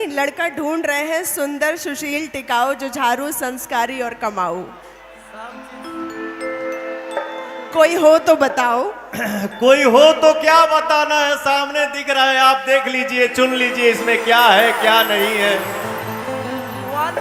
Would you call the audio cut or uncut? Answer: uncut